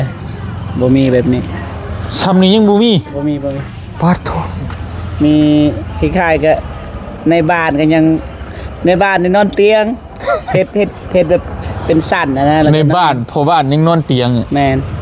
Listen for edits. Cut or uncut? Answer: uncut